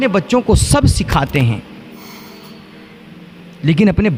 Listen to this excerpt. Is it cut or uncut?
uncut